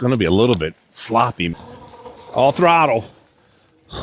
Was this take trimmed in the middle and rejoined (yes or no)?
yes